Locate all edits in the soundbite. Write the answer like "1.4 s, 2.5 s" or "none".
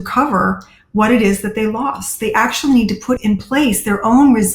3.2 s